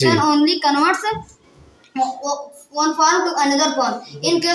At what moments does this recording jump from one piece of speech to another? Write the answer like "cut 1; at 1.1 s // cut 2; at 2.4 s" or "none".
none